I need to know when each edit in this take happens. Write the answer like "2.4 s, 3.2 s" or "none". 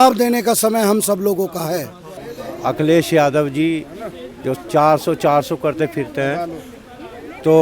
2.2 s